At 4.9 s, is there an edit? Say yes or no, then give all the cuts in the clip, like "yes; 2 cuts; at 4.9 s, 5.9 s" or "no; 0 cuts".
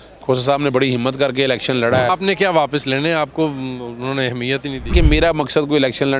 yes; 2 cuts; at 2.1 s, 4.9 s